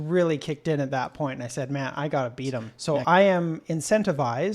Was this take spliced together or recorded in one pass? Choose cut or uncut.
cut